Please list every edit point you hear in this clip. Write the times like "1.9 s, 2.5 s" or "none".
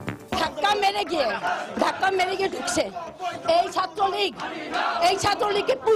none